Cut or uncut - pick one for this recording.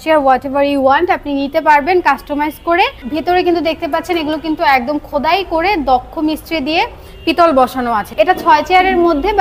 cut